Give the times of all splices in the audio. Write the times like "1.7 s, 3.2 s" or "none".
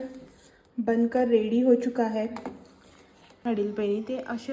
3.5 s